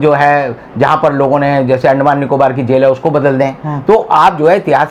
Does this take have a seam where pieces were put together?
no; 0 cuts

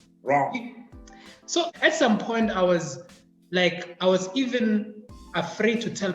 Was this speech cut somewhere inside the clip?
yes; 1 cut; at 1.7 s

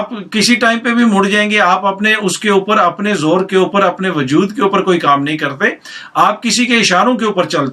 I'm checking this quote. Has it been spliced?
no; 0 cuts

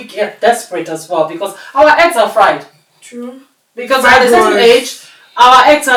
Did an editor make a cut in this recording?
no; 0 cuts

